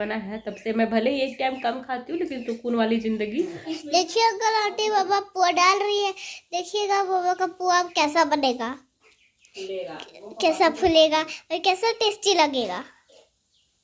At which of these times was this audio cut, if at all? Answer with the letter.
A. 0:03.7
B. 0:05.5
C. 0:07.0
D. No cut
A